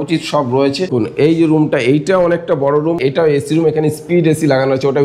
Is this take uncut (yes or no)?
no